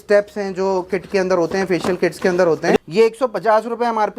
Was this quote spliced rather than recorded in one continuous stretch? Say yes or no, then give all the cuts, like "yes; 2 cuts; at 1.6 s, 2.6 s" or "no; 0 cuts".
yes; 1 cut; at 2.8 s